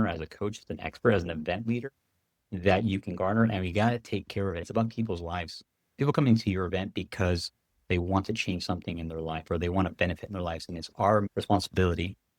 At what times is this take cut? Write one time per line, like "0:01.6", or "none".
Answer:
0:04.7
0:11.3